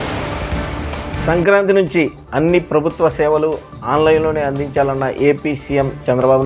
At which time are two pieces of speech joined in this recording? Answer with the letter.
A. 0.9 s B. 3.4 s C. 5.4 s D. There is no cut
A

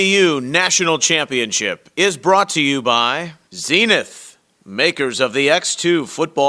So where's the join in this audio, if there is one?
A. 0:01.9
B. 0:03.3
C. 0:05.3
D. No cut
B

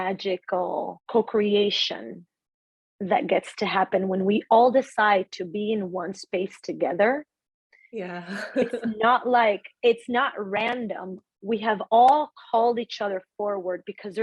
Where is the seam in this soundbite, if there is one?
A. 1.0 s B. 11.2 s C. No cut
A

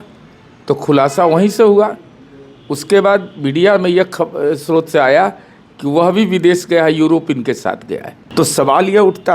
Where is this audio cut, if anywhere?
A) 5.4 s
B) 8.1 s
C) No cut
B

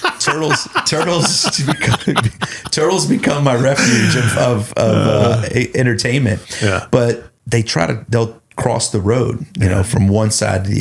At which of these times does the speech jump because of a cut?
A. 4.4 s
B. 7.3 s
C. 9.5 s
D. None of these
B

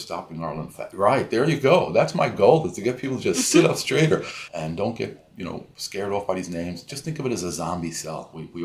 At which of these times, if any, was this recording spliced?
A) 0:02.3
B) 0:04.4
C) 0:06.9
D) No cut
B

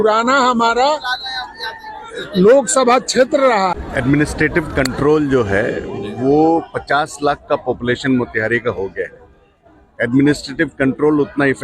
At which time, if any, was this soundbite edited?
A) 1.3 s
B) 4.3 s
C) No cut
B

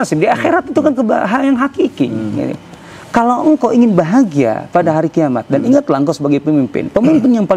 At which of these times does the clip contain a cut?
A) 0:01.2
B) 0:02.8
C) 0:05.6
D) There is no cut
D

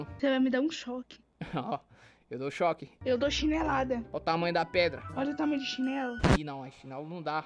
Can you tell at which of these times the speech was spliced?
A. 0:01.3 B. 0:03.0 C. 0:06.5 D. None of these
D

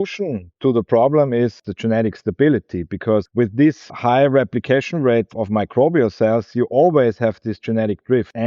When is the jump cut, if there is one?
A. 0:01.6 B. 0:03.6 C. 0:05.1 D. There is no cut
A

